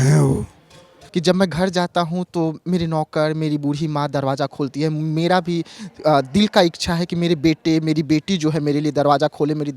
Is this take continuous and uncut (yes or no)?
no